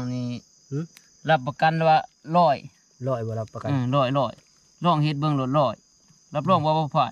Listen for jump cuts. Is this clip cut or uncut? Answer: uncut